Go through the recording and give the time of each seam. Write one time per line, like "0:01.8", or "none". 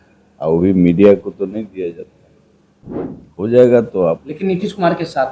none

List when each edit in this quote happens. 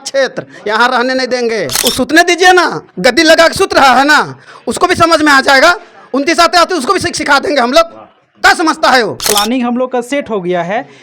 0:01.7
0:09.2

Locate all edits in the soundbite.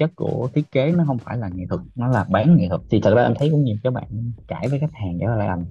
0:01.7
0:02.8

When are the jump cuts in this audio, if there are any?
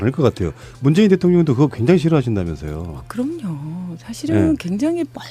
0:02.9

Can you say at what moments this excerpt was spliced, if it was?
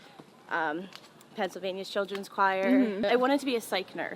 0:03.0

